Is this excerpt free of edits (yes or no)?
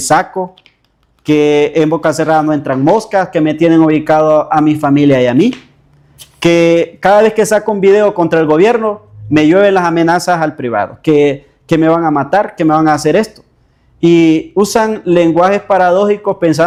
yes